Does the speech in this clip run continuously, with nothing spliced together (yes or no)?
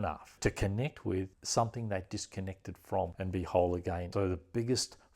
no